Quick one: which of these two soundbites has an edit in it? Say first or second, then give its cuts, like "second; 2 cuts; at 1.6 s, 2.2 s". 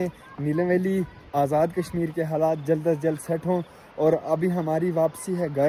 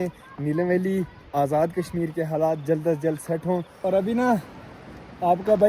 second; 1 cut; at 3.7 s